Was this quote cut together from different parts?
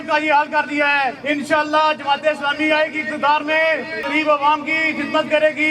yes; 2 cuts; at 1.2 s, 4.0 s

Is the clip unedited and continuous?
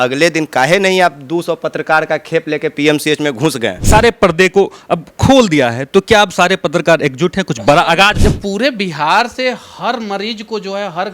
no; 2 cuts; at 3.8 s, 8.2 s

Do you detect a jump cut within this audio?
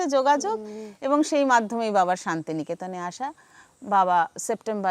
no; 0 cuts

